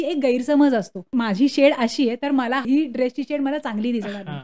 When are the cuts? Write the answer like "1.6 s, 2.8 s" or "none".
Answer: 1.2 s, 2.6 s